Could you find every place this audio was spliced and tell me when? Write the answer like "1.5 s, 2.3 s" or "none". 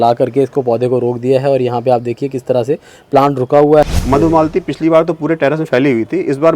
3.9 s